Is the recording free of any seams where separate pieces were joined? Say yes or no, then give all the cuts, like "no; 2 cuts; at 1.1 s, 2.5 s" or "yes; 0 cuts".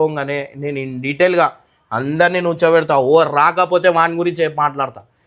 yes; 0 cuts